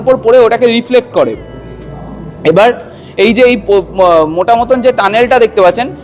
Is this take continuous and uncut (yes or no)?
yes